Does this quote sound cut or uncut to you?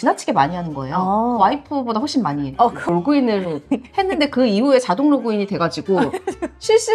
cut